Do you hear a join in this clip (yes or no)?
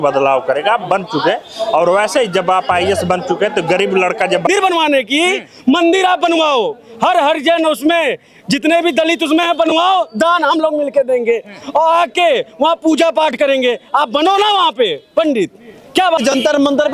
yes